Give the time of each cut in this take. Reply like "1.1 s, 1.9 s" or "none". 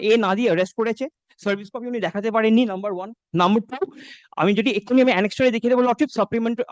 none